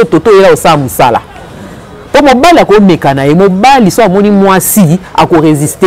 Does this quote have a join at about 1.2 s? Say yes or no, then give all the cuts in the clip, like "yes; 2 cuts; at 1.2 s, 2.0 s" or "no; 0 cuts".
no; 0 cuts